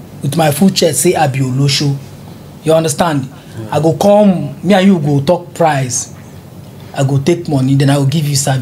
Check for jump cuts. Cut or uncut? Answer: uncut